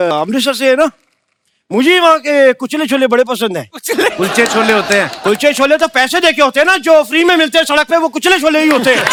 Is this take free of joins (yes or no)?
yes